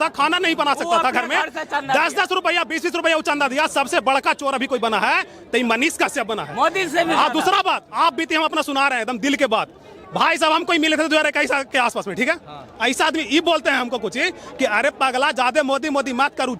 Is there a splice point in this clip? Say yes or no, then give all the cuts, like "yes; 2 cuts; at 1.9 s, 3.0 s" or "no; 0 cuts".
no; 0 cuts